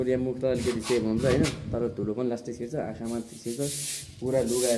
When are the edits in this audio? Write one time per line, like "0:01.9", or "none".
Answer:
none